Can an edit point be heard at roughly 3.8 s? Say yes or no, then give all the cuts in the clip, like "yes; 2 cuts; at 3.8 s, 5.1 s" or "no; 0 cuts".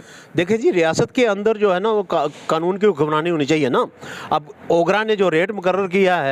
no; 0 cuts